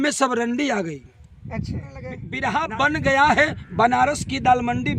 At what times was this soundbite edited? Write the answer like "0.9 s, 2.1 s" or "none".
2.3 s